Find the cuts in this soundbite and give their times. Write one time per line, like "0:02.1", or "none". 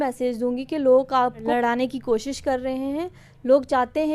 0:01.4